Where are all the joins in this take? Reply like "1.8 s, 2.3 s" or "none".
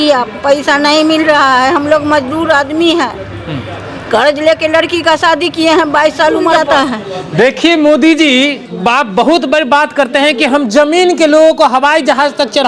6.5 s